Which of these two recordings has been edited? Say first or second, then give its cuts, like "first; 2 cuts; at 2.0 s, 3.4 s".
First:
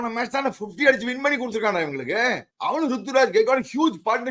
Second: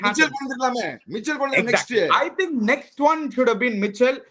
first; 1 cut; at 2.5 s